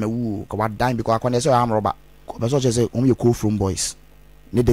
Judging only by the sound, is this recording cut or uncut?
cut